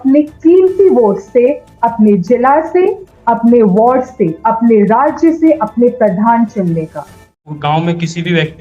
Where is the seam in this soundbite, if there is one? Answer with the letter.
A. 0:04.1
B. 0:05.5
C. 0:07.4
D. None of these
C